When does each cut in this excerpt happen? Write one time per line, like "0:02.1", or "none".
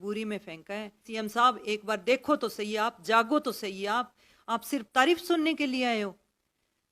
0:01.1